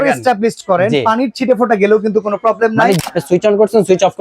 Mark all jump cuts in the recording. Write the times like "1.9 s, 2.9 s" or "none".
3.0 s